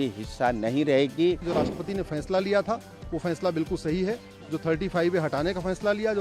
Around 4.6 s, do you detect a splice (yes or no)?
no